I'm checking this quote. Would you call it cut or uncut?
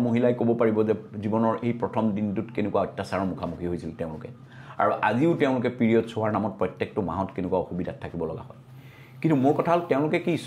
uncut